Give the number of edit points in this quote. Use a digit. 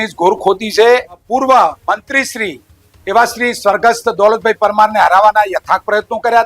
1